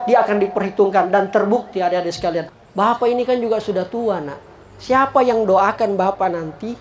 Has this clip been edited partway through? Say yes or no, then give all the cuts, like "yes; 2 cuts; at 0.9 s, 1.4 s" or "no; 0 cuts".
yes; 1 cut; at 2.4 s